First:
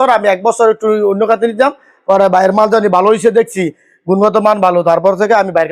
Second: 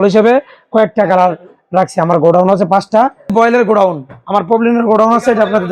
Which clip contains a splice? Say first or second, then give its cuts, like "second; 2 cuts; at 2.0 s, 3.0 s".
second; 1 cut; at 3.3 s